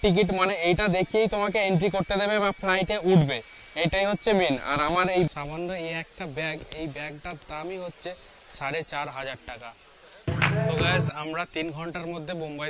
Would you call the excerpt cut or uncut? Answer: cut